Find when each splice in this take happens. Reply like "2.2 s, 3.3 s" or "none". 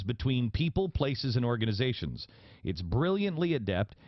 2.1 s